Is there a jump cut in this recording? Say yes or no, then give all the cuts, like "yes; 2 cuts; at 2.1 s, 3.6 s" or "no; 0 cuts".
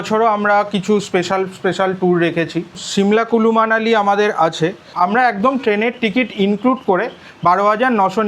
yes; 2 cuts; at 2.8 s, 4.9 s